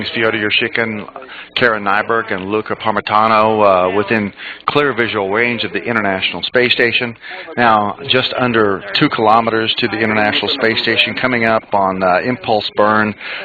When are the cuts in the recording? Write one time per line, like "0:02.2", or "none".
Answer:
0:06.6

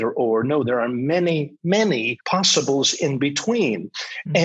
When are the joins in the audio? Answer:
0:01.6

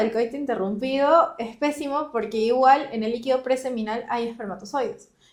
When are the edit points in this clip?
none

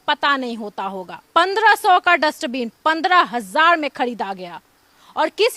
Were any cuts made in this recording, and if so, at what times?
0:01.2

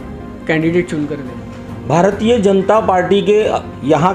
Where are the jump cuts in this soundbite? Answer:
none

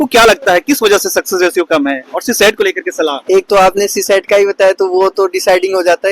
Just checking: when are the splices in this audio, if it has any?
none

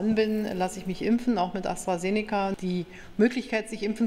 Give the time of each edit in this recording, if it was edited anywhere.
0:02.6

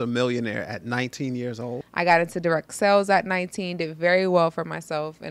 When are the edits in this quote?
0:01.8

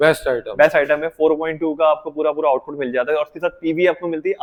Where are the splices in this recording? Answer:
none

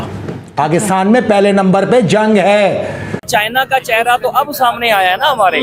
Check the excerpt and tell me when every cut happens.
0:03.2

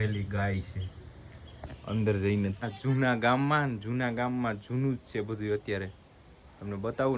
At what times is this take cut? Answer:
0:02.6

